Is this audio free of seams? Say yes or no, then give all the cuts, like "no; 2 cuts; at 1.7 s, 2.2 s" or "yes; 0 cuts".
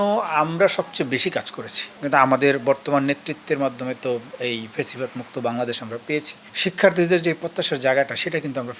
no; 2 cuts; at 2.0 s, 6.5 s